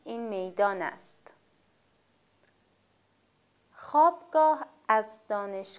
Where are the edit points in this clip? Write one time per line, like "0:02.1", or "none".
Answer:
0:01.7